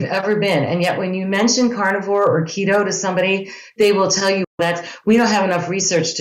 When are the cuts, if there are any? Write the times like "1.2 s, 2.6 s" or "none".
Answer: none